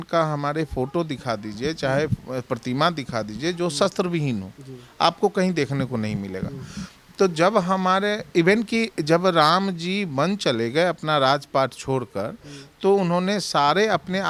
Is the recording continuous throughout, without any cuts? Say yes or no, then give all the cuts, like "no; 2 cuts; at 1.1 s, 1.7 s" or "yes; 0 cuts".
yes; 0 cuts